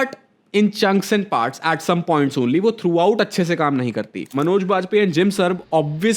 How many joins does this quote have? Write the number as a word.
one